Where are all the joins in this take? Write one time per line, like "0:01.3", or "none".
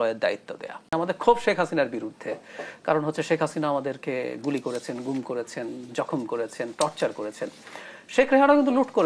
0:00.9